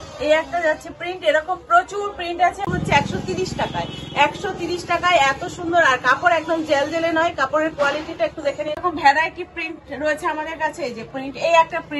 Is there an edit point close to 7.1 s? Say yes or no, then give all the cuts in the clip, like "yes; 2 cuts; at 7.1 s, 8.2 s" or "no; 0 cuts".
no; 2 cuts; at 2.6 s, 8.8 s